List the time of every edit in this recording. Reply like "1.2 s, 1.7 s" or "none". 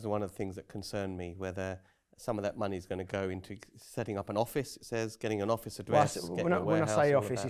none